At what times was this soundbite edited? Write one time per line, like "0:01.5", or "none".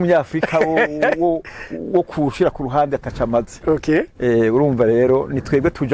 none